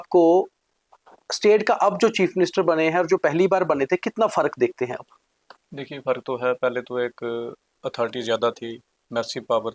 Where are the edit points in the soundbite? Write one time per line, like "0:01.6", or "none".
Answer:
none

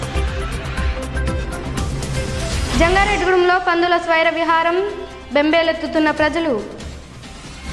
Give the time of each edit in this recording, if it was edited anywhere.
none

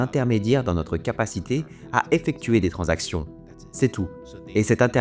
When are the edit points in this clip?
none

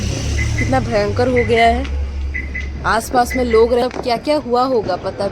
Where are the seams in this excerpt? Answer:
0:03.8

